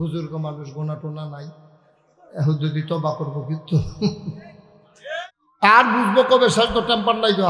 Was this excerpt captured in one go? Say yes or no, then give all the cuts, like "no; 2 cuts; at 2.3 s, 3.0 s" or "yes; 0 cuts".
no; 1 cut; at 5.4 s